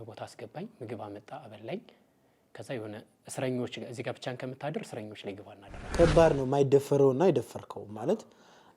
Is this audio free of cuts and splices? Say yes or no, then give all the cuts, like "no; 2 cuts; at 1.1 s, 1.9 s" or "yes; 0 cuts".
no; 1 cut; at 5.9 s